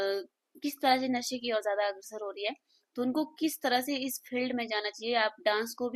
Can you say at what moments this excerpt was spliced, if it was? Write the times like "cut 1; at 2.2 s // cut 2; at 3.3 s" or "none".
none